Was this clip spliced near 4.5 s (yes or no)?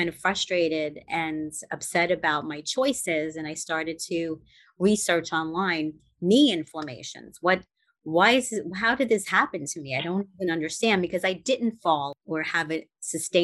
no